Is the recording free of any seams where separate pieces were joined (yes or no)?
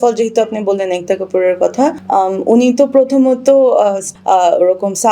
no